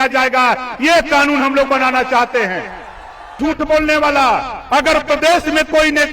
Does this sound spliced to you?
yes; 1 cut; at 3.4 s

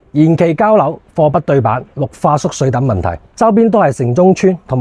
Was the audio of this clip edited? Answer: yes; 1 cut; at 3.2 s

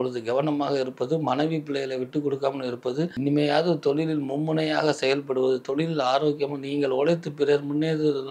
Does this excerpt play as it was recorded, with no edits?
no; 1 cut; at 3.1 s

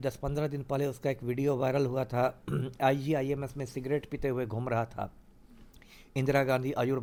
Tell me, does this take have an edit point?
no; 0 cuts

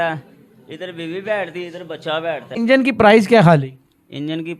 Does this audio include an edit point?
yes; 1 cut; at 2.6 s

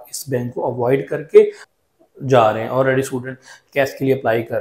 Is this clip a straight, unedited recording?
no; 1 cut; at 1.7 s

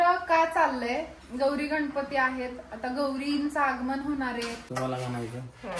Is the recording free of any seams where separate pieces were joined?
no; 1 cut; at 4.6 s

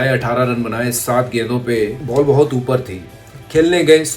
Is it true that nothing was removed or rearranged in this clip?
no; 1 cut; at 2.0 s

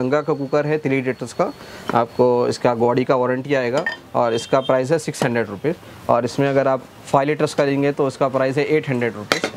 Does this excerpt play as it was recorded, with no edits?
yes; 0 cuts

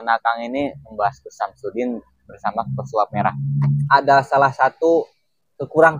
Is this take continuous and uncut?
no; 1 cut; at 3.8 s

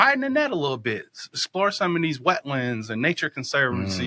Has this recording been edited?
no; 0 cuts

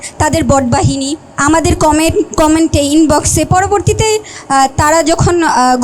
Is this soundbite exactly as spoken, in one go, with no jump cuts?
no; 1 cut; at 1.2 s

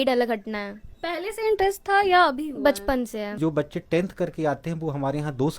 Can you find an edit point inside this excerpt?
yes; 1 cut; at 3.4 s

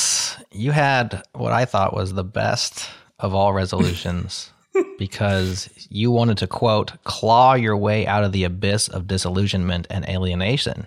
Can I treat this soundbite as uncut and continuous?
yes; 0 cuts

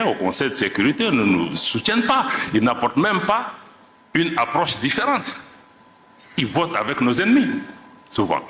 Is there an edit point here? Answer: no; 0 cuts

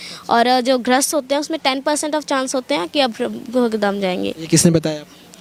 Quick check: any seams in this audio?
no; 0 cuts

